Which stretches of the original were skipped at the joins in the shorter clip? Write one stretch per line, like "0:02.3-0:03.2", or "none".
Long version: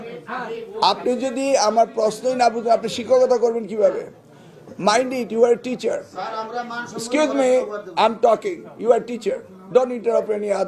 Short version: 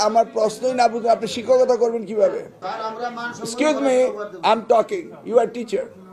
0:04.2-0:06.2